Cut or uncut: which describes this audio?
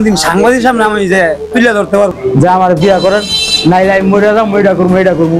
cut